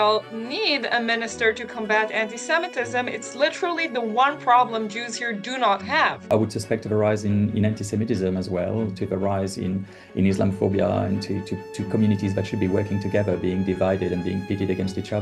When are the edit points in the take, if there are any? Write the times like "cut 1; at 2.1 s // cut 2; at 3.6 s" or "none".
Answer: cut 1; at 6.3 s

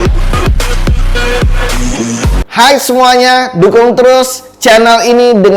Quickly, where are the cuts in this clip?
cut 1; at 2.4 s

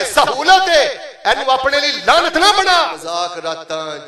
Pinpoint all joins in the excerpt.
cut 1; at 3.0 s

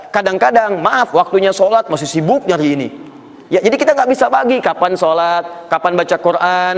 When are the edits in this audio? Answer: none

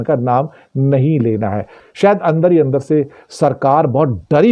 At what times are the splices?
cut 1; at 1.9 s

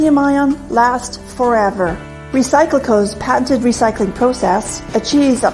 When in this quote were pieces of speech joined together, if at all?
cut 1; at 1.0 s

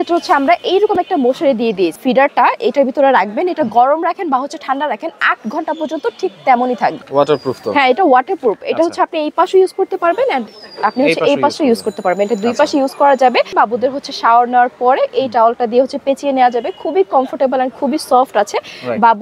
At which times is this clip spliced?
cut 1; at 2.0 s // cut 2; at 7.0 s // cut 3; at 13.5 s

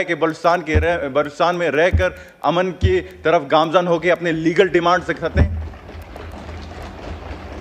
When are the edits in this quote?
none

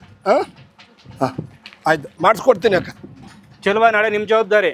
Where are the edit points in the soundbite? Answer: none

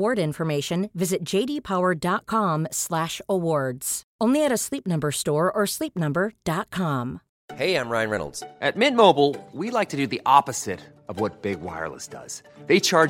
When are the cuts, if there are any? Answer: cut 1; at 7.3 s

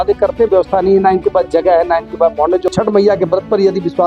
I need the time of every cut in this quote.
cut 1; at 2.7 s

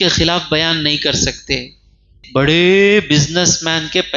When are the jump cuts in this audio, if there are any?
cut 1; at 2.2 s

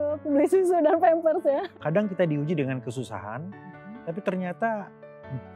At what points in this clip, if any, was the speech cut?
cut 1; at 1.7 s

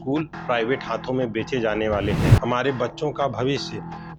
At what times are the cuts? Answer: cut 1; at 2.4 s

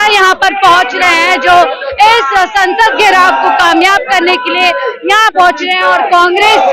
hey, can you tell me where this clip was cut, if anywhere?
none

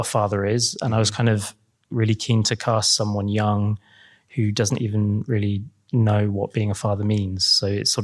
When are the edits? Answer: cut 1; at 5.7 s

